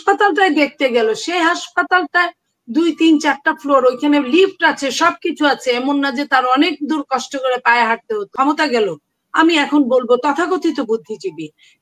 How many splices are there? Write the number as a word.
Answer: one